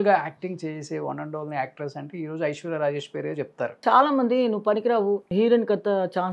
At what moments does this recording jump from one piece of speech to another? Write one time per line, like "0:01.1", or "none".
0:03.8
0:05.3

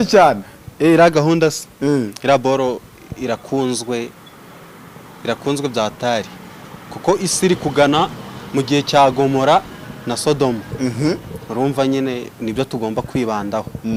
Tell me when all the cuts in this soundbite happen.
none

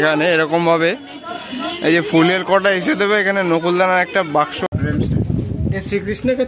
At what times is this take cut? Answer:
0:04.7

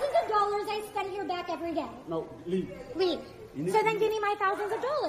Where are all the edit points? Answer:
0:01.7

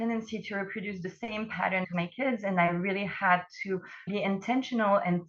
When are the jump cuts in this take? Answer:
0:01.9
0:04.1

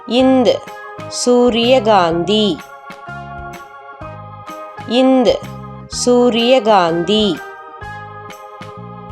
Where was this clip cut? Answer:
0:02.6
0:04.7
0:07.4

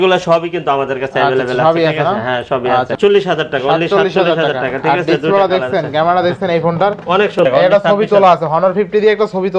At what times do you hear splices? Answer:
0:02.9
0:07.4

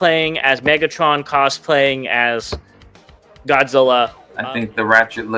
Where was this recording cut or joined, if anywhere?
0:04.3

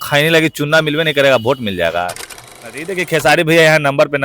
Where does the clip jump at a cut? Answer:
0:02.8

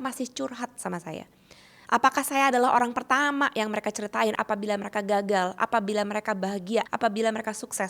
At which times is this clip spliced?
0:04.4
0:06.9

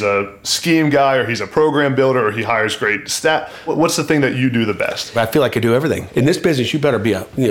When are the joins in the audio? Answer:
0:03.7
0:05.1
0:06.0

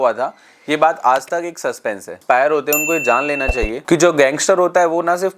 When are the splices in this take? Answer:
0:02.1

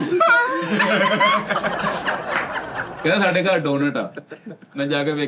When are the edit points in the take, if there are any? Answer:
0:02.8

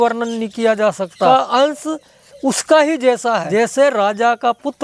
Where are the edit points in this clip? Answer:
0:01.3
0:03.5

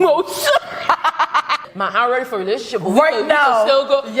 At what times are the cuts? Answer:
0:01.6

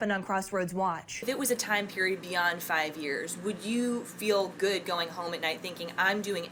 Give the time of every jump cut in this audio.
0:01.2

